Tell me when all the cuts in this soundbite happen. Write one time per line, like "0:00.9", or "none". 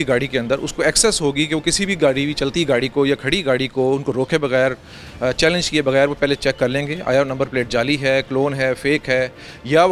none